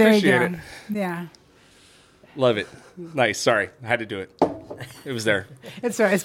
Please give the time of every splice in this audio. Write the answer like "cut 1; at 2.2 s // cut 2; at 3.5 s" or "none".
none